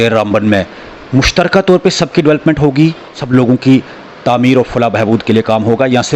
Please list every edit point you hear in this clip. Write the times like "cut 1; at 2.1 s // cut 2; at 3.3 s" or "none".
cut 1; at 3.1 s